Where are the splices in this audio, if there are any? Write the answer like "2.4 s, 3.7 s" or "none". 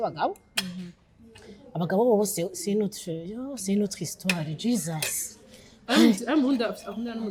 none